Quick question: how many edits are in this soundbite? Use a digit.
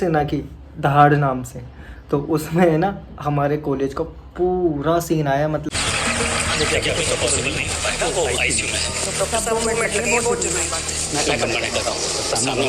1